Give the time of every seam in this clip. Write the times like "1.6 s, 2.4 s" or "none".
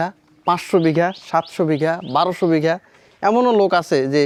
none